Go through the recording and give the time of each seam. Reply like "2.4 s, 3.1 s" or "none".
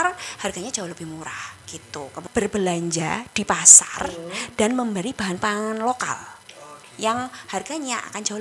2.2 s